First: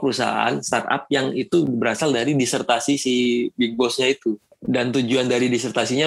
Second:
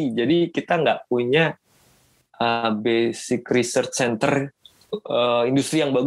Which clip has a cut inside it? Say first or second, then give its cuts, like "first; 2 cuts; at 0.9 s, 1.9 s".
first; 1 cut; at 4.5 s